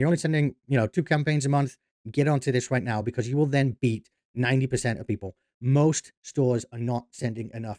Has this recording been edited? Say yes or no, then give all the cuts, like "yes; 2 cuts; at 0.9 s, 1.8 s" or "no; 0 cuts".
no; 0 cuts